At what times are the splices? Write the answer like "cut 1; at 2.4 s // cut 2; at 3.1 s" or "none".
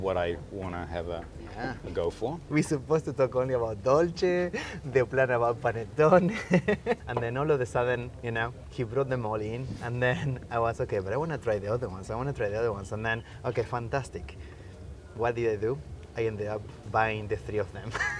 cut 1; at 2.5 s // cut 2; at 7.1 s // cut 3; at 8.6 s